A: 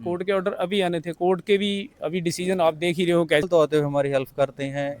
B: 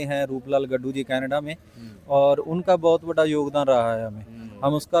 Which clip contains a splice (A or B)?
A